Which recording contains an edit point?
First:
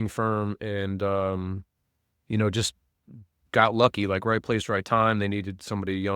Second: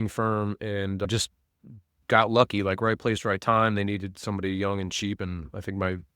second; 1 cut; at 1.1 s

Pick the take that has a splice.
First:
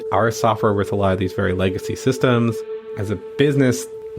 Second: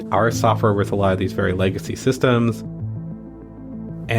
first; 1 cut; at 2.9 s

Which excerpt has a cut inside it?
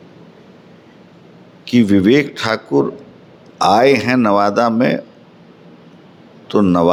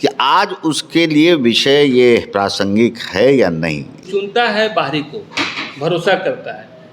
second; 1 cut; at 4.2 s

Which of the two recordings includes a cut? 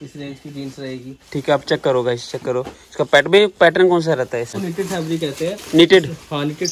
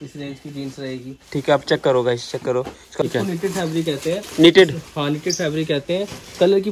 second; 1 cut; at 3.1 s

